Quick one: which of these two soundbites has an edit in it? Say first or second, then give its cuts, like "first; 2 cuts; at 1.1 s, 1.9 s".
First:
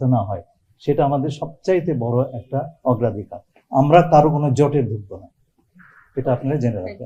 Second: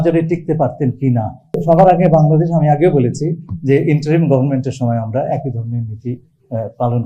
second; 1 cut; at 1.4 s